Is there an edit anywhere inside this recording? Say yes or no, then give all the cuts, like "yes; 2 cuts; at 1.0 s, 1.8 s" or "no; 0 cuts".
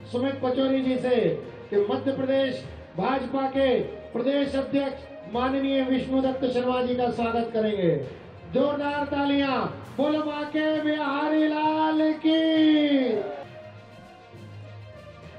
yes; 1 cut; at 13.4 s